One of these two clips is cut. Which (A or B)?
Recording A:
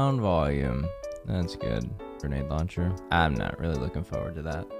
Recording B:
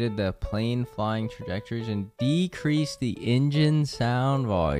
A